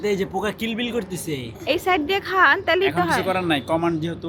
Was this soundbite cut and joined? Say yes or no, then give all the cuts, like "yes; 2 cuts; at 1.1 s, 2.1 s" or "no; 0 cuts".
no; 0 cuts